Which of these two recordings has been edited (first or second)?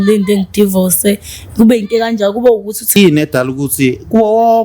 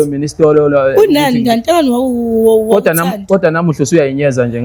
first